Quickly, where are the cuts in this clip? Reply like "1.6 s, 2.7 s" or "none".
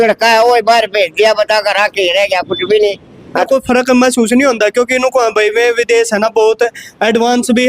3.4 s

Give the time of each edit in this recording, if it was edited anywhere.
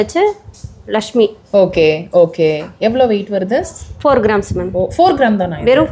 none

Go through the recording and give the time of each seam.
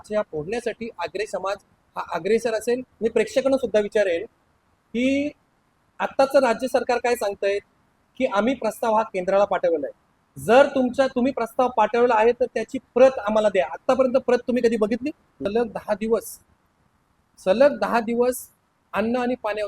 2.9 s, 15.4 s

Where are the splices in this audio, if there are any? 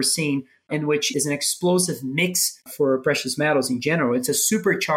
1.0 s, 2.7 s

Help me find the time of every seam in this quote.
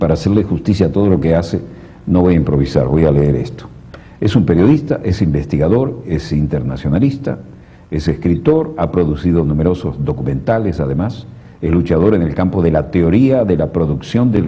4.6 s

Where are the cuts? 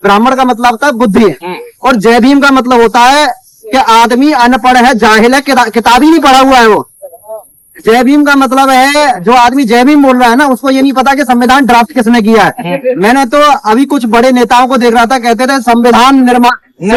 none

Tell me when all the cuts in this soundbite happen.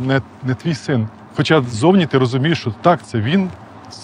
1.2 s

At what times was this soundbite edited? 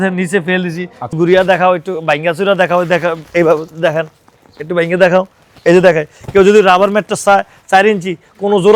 1.1 s

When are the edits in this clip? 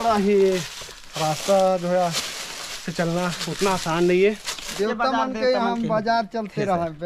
4.7 s

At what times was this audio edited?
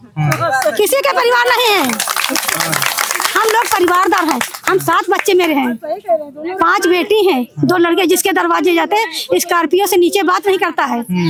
none

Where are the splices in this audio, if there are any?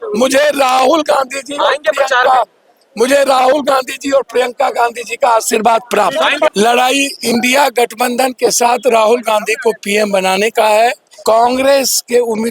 6.5 s, 11.1 s

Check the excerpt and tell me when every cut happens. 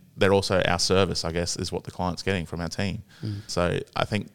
3.4 s

